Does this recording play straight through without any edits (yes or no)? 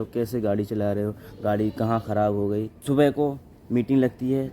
no